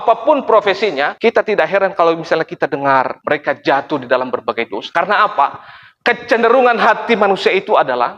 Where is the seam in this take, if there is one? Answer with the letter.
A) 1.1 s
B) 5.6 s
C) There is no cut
A